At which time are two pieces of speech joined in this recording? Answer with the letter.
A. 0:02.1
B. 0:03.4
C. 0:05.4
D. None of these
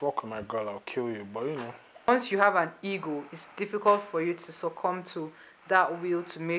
A